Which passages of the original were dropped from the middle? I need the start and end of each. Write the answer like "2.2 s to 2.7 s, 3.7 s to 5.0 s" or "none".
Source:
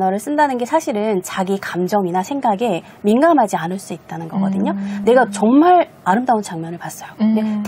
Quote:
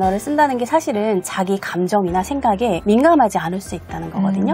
2.8 s to 3.0 s